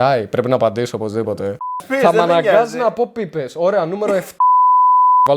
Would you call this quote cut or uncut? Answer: cut